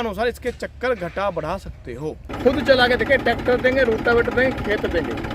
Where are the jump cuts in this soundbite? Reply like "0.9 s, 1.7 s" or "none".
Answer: 2.2 s

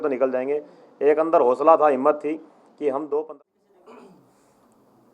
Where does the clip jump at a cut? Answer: 3.3 s

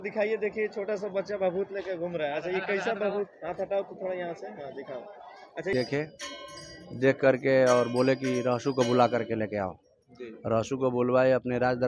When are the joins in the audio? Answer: 5.7 s

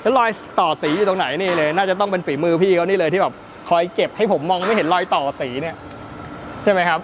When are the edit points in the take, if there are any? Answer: none

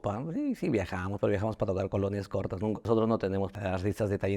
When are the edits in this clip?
2.8 s, 3.5 s

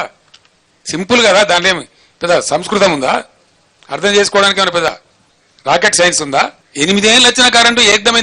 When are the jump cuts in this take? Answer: 6.6 s

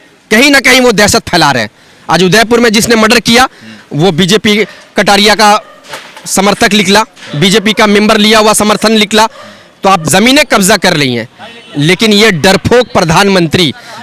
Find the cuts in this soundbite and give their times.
10.0 s

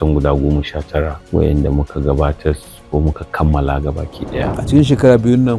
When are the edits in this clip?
1.2 s, 4.5 s

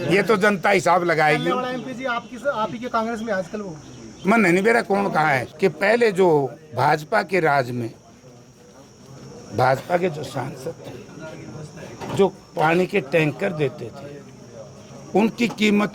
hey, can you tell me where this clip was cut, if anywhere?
5.5 s

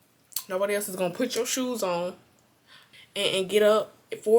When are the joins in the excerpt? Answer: 2.8 s

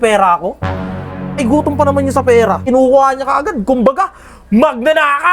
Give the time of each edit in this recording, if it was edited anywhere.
2.6 s

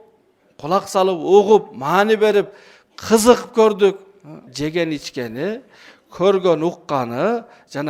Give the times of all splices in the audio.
4.5 s

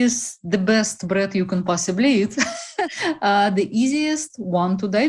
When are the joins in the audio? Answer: 2.7 s

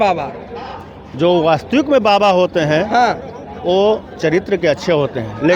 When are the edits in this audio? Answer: none

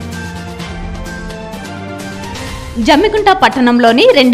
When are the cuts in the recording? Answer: none

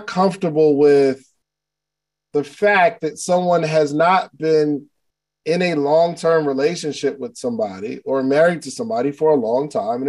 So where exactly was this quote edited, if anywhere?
none

